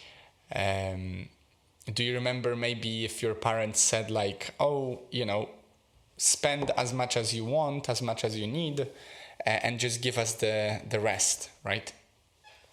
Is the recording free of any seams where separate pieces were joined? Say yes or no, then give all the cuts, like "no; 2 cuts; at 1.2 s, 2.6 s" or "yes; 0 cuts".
yes; 0 cuts